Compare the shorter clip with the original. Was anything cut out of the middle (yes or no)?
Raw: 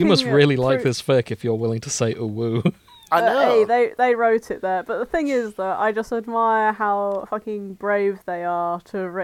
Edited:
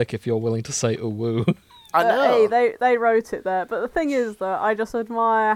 no